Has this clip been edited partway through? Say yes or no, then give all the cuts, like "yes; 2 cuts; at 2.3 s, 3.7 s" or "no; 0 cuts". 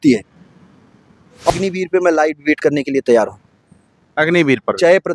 yes; 1 cut; at 1.5 s